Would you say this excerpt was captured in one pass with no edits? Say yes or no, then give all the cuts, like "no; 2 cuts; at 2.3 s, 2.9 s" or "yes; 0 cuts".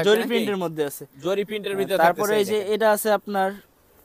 yes; 0 cuts